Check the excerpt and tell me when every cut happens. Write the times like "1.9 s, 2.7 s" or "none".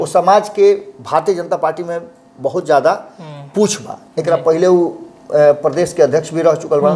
none